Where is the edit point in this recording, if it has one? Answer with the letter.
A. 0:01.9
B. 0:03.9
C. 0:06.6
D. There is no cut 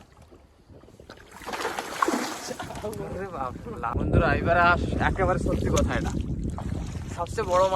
B